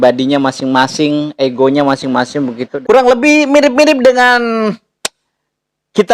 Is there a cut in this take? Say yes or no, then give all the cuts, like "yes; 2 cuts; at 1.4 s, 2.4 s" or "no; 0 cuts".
yes; 1 cut; at 2.7 s